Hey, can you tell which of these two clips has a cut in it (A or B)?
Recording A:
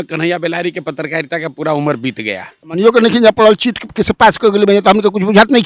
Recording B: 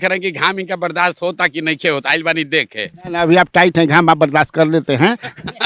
A